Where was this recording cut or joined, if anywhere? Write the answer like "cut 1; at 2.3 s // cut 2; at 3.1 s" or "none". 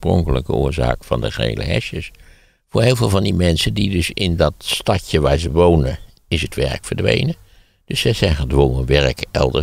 none